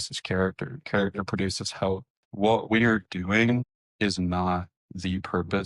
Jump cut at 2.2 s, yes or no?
yes